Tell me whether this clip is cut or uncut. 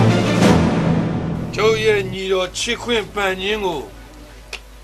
cut